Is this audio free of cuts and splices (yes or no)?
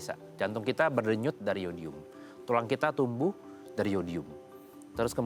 yes